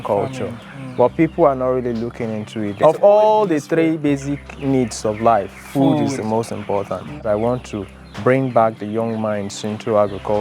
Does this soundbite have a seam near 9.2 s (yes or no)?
no